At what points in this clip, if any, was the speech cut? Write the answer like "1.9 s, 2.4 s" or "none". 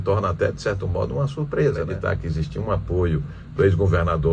2.0 s